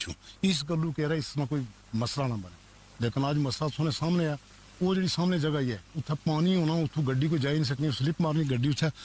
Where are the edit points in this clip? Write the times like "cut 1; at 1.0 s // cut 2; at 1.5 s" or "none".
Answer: none